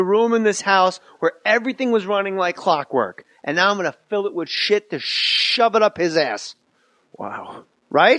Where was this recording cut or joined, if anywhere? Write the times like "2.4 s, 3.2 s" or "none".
4.9 s

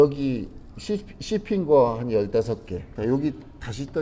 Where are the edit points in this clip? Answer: 2.9 s

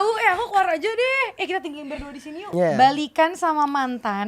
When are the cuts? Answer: 2.4 s

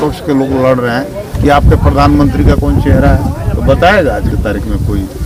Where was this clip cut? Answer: none

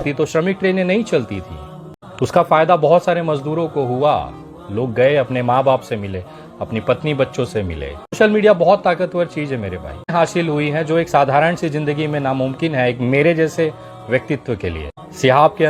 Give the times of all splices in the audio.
8.2 s, 10.1 s

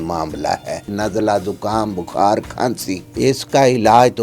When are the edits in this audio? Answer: 0.9 s, 3.0 s

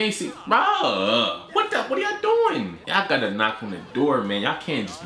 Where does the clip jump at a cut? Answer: 2.8 s

